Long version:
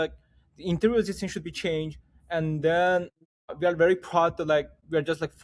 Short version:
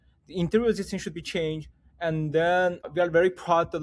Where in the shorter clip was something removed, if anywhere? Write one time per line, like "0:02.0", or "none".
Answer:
0:02.8